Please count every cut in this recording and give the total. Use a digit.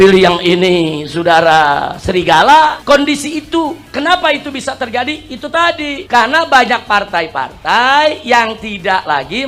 0